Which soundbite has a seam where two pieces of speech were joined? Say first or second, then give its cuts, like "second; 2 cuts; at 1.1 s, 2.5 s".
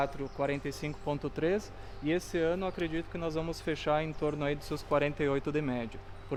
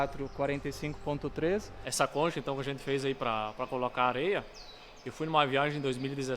second; 1 cut; at 1.8 s